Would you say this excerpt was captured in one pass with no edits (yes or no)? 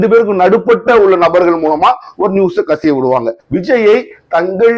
no